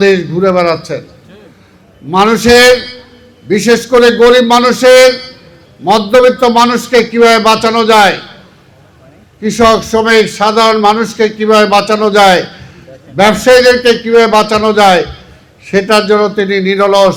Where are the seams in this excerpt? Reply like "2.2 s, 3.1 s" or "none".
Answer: none